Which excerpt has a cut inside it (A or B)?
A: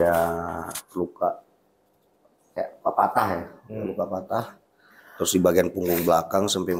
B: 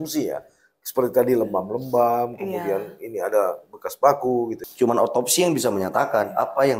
B